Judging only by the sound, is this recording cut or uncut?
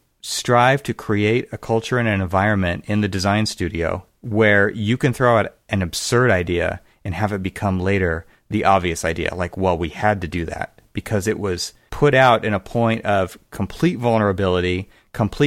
cut